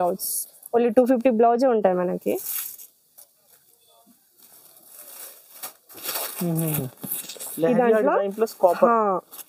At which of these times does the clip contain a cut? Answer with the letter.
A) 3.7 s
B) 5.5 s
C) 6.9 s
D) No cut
D